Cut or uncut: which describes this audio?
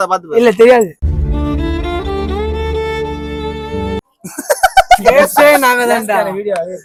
uncut